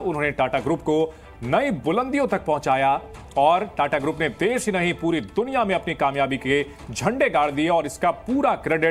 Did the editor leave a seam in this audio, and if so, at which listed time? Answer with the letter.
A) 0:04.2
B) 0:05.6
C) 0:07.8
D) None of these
D